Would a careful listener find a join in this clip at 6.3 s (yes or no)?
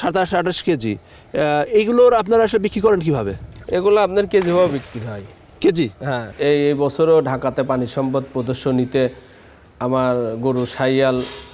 yes